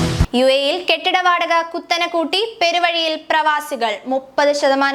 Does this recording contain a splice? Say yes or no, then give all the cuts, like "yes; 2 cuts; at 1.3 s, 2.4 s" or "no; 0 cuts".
no; 0 cuts